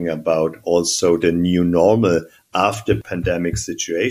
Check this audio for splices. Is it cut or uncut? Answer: cut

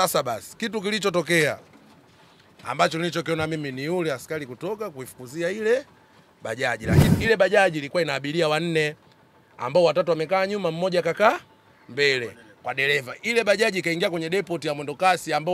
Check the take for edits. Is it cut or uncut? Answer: cut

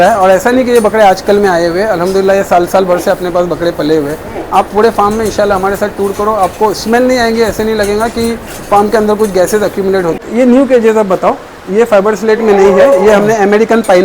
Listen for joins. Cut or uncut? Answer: cut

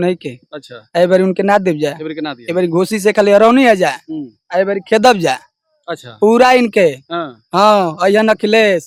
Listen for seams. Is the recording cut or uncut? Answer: uncut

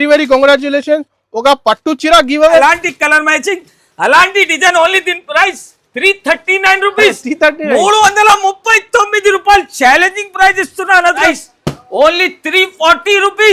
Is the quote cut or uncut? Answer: cut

